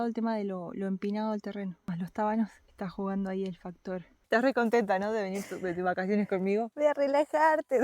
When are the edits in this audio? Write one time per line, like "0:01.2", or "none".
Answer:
0:01.8
0:02.6
0:04.1
0:06.7